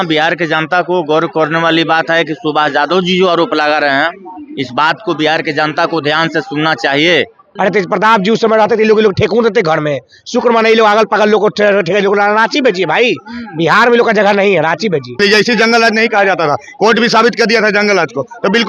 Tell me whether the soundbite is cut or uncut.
cut